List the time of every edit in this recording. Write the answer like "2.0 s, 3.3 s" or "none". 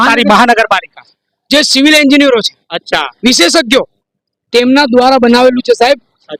none

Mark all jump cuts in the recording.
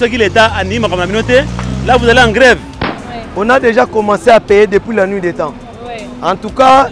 2.9 s

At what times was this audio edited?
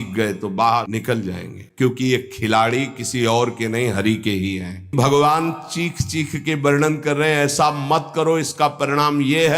1.4 s, 4.9 s

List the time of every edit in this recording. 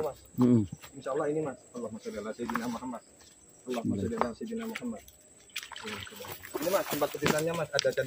none

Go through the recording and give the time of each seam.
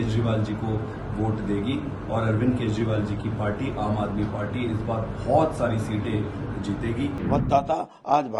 7.2 s

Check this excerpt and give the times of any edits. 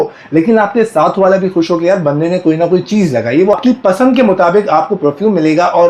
3.5 s

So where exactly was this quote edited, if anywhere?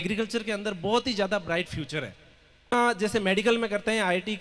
2.7 s

